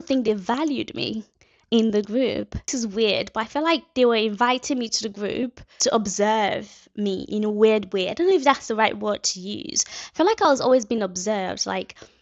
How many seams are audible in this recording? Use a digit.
2